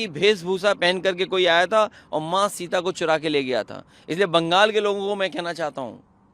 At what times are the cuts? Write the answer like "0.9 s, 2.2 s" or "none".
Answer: none

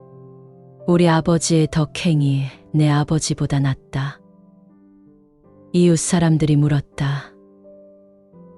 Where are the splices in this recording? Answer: none

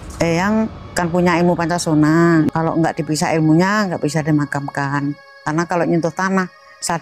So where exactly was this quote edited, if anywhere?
0.8 s, 2.5 s

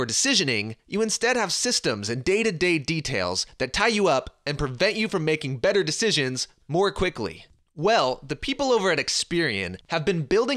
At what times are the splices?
1.5 s

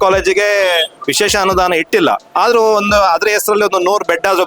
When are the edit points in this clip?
1.0 s, 2.2 s

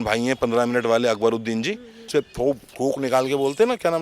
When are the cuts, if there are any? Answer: 2.1 s

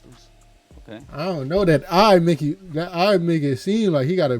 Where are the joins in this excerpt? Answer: 1.1 s

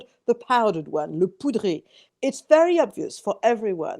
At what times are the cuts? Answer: 2.0 s

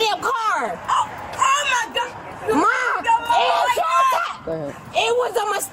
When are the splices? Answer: none

